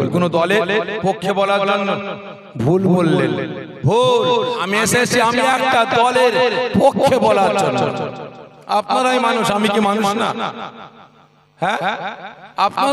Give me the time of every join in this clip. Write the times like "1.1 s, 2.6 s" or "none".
4.6 s